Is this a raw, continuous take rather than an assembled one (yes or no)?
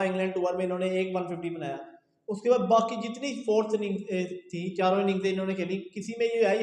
yes